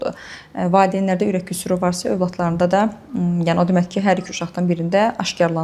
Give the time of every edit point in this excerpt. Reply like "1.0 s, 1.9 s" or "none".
none